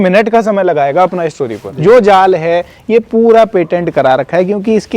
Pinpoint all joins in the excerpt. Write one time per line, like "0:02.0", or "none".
0:01.6